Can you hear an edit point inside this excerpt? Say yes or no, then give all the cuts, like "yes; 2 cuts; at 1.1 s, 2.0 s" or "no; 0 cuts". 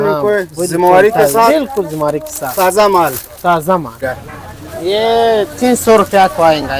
yes; 1 cut; at 4.0 s